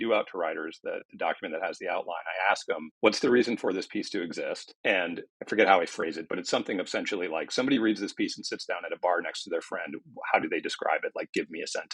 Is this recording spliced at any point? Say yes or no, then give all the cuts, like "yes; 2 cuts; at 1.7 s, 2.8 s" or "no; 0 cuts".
yes; 1 cut; at 4.7 s